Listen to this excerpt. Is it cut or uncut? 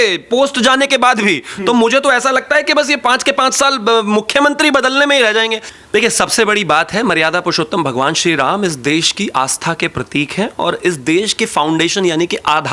cut